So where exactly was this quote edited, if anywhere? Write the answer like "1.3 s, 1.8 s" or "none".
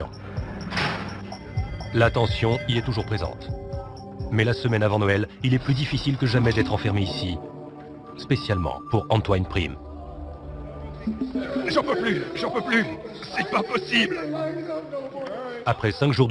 12.9 s